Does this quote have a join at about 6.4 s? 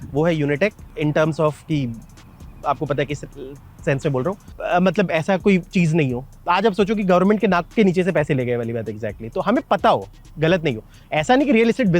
no; 2 cuts; at 0.9 s, 4.6 s

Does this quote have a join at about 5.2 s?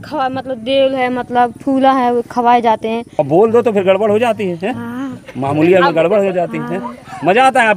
no; 1 cut; at 3.2 s

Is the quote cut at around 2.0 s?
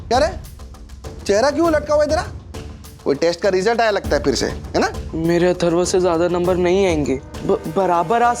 no; 2 cuts; at 5.0 s, 7.3 s

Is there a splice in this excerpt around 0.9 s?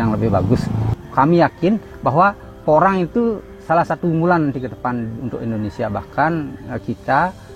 yes; 1 cut; at 0.9 s

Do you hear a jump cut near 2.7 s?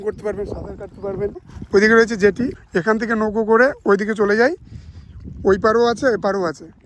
no; 0 cuts

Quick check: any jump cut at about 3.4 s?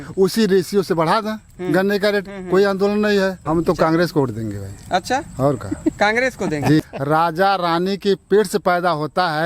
yes; 2 cuts; at 3.4 s, 6.8 s

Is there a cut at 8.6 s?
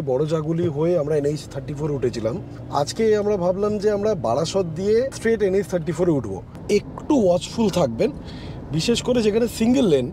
no; 3 cuts; at 2.5 s, 5.1 s, 6.5 s

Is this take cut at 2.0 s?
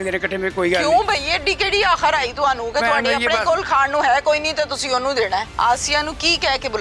no; 1 cut; at 5.5 s

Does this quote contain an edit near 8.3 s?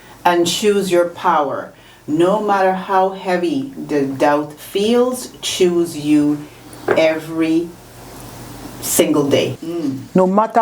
no; 1 cut; at 9.6 s

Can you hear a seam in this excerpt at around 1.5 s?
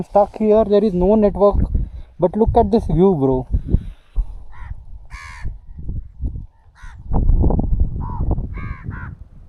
no; 0 cuts

